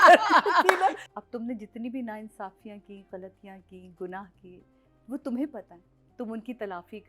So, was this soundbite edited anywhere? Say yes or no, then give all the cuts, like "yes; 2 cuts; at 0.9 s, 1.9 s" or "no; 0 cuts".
yes; 1 cut; at 1.1 s